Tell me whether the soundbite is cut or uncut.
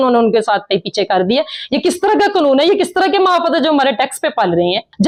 uncut